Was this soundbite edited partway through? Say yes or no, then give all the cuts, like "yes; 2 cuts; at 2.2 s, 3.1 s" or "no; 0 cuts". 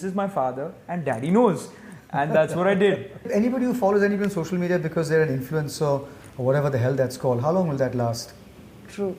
yes; 1 cut; at 3.3 s